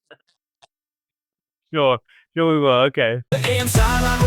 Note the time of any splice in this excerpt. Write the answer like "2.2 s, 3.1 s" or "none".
3.2 s